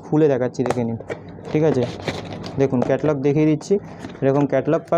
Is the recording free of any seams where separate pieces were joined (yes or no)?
yes